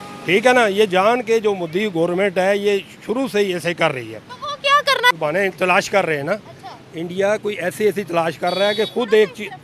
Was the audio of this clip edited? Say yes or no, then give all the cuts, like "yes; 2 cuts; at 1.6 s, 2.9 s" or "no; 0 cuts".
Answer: yes; 1 cut; at 5.2 s